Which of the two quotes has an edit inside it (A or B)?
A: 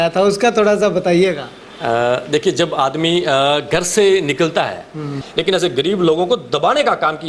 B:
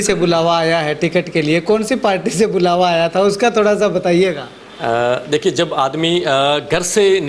A